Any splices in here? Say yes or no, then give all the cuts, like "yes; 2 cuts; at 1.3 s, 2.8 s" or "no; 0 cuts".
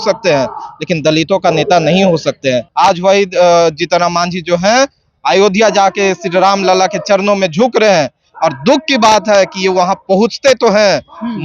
yes; 1 cut; at 2.7 s